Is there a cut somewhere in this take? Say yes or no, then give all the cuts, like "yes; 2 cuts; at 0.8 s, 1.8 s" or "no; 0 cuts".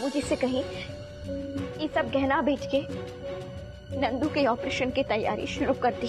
no; 0 cuts